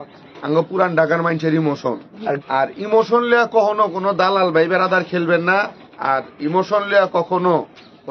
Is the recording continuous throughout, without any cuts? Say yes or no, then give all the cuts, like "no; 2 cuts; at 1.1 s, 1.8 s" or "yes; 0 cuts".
no; 1 cut; at 2.4 s